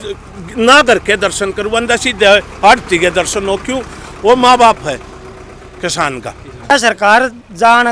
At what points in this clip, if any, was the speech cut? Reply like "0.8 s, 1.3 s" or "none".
6.7 s